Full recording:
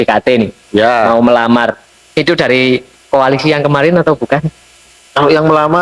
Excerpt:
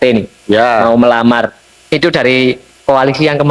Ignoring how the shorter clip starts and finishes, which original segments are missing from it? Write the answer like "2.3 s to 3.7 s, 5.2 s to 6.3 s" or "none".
none